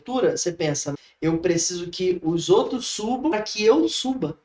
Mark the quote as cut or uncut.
cut